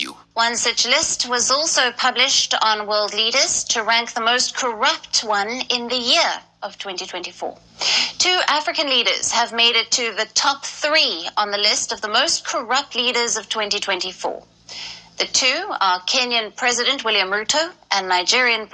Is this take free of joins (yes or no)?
yes